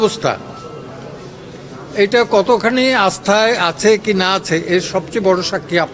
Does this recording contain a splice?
no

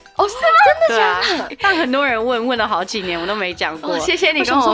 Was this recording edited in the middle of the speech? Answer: yes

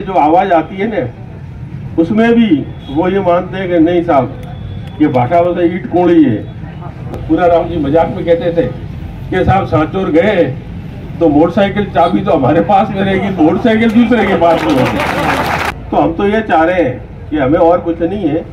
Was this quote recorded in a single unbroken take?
no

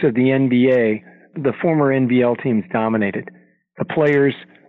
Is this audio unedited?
no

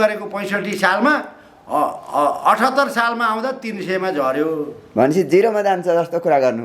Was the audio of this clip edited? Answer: no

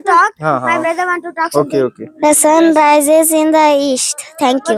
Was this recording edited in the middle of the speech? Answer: no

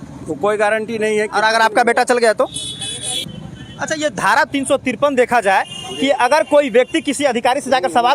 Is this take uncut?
no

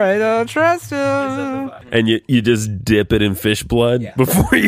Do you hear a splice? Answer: yes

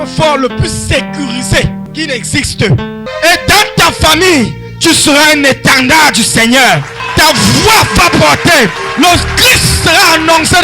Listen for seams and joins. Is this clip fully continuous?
no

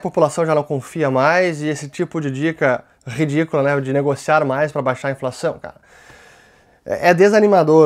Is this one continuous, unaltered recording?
yes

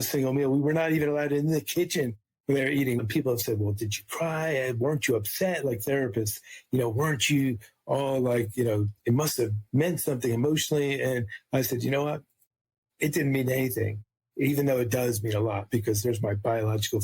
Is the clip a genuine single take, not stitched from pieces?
no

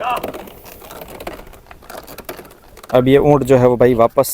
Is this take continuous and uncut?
no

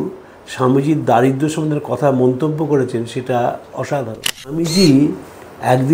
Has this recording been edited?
yes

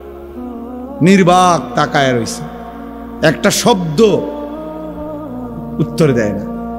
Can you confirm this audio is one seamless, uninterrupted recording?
no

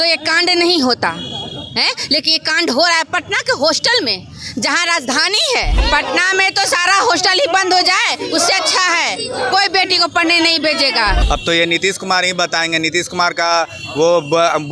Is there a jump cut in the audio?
yes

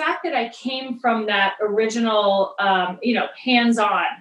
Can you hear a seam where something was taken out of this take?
no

